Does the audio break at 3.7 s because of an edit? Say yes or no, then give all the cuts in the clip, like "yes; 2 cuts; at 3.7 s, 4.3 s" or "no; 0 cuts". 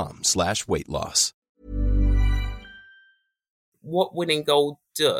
yes; 1 cut; at 3.7 s